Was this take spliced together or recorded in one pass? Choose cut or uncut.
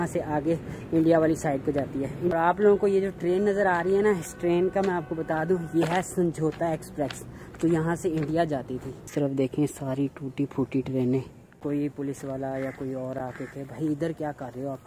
cut